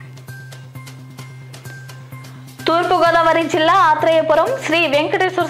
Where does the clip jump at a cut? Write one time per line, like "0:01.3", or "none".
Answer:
0:01.1
0:02.6